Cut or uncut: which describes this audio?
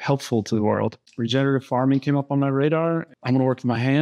cut